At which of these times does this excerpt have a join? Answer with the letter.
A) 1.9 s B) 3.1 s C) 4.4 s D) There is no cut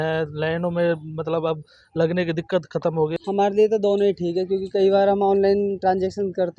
B